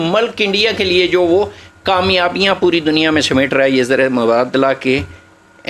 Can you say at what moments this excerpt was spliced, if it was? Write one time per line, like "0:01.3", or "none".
none